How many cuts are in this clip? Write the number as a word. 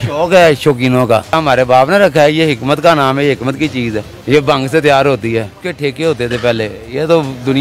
three